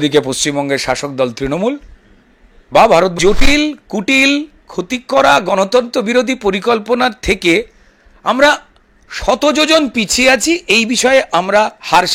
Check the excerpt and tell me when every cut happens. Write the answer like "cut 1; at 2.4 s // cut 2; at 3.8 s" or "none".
cut 1; at 3.1 s